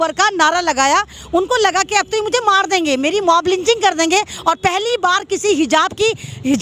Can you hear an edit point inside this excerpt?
no; 0 cuts

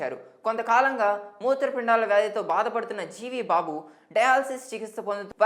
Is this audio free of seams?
yes; 0 cuts

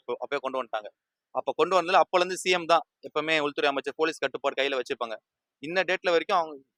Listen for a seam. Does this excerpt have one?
no; 0 cuts

